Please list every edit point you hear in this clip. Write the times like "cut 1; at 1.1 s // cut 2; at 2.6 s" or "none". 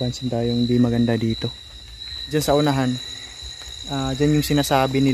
cut 1; at 2.2 s